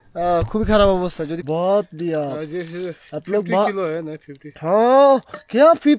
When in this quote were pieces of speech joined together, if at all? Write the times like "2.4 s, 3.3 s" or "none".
1.4 s